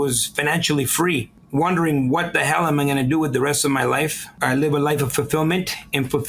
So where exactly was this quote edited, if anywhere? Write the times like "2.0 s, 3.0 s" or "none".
1.4 s, 4.4 s